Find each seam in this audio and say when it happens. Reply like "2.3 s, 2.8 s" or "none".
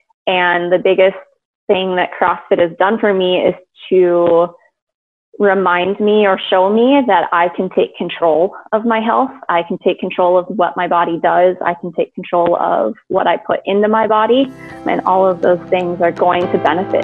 14.8 s, 16.2 s